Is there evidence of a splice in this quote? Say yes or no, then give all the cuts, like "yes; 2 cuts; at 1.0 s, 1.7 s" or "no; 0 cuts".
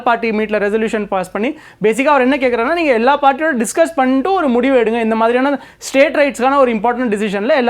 no; 0 cuts